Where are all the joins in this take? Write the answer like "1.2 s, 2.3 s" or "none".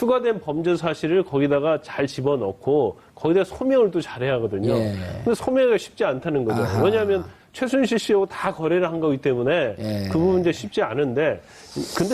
4.4 s